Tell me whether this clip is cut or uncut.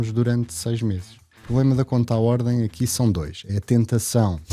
cut